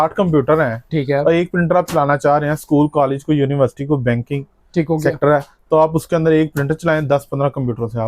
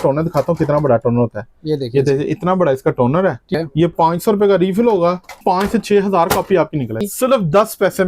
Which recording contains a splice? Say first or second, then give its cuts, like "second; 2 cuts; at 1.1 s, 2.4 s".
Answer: second; 3 cuts; at 3.5 s, 5.4 s, 7.0 s